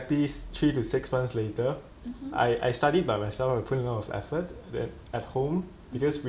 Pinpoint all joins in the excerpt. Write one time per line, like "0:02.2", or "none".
none